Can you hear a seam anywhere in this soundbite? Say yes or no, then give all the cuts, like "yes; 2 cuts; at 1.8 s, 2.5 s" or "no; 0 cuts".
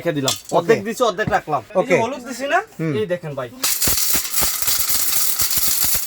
yes; 1 cut; at 1.7 s